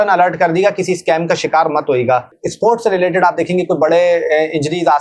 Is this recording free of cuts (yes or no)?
no